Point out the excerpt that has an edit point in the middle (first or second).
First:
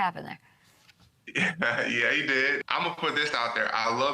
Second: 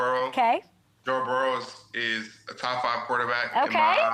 first